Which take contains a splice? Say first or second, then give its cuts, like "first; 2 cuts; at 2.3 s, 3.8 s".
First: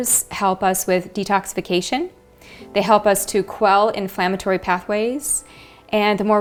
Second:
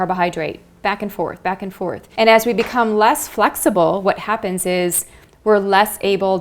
second; 1 cut; at 2.0 s